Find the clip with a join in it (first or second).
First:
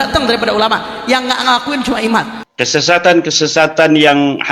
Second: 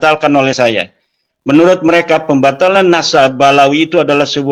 first